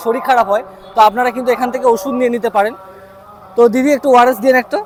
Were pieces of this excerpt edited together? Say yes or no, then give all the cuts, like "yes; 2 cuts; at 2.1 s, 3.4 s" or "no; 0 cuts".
no; 0 cuts